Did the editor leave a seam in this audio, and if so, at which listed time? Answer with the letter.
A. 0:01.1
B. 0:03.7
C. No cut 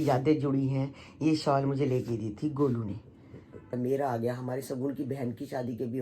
B